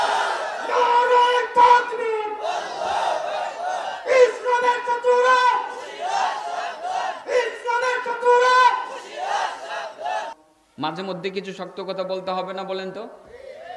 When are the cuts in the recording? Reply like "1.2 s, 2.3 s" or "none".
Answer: 10.4 s